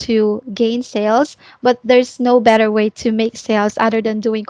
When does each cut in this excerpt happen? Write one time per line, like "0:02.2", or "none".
none